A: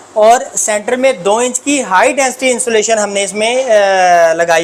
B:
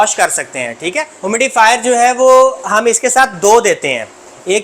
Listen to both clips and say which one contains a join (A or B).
B